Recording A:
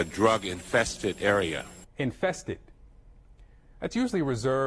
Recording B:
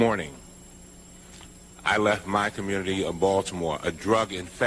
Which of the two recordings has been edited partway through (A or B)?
A